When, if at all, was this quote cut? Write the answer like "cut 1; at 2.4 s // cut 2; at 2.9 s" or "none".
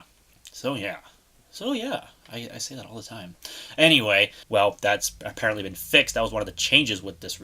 cut 1; at 4.4 s